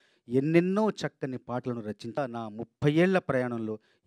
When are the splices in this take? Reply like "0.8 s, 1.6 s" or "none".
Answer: 2.2 s